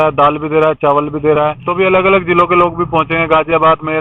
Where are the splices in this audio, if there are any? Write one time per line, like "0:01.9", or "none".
0:01.6